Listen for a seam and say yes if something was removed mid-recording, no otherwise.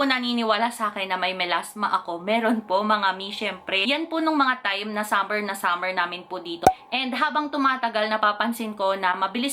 yes